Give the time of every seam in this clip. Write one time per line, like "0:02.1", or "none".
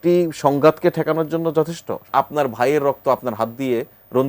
0:02.1